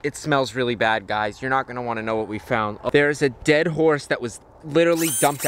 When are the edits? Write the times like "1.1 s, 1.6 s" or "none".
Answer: 2.8 s